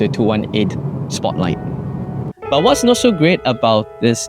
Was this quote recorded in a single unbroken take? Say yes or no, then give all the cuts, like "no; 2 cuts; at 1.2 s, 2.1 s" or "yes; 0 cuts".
no; 1 cut; at 2.3 s